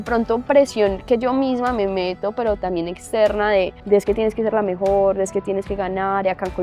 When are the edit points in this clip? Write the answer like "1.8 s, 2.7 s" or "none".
3.8 s

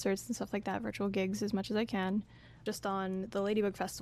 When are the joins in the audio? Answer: 2.6 s

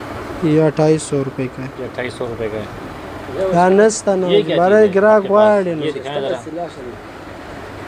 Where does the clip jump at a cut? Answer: none

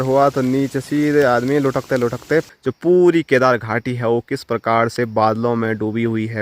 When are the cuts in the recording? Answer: 2.5 s

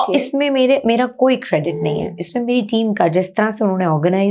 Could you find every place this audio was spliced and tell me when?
none

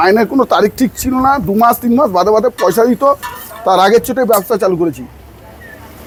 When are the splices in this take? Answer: none

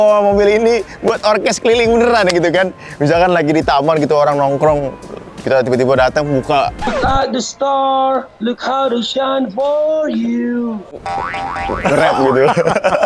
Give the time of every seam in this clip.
none

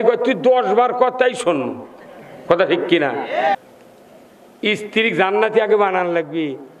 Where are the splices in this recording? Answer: 3.6 s

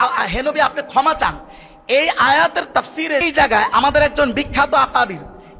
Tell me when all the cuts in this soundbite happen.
3.2 s

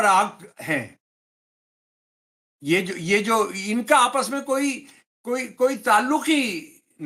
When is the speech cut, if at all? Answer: none

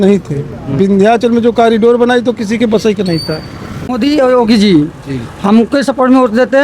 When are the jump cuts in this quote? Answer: 3.9 s

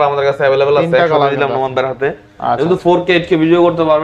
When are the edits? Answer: none

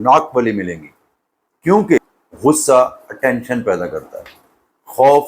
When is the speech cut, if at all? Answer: 2.0 s

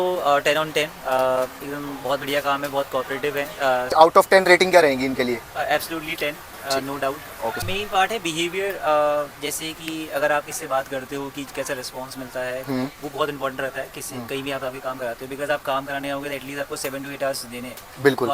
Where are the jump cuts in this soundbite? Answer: 3.9 s, 7.6 s

